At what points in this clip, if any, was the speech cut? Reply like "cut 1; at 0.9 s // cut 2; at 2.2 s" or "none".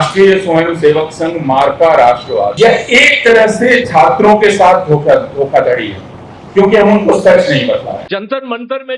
cut 1; at 2.5 s // cut 2; at 8.0 s